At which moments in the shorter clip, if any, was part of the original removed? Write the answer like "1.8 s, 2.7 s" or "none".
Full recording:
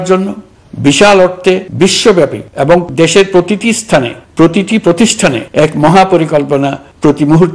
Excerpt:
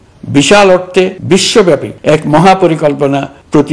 1.9 s